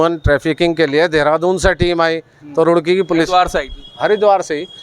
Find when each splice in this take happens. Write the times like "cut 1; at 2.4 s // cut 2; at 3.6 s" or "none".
none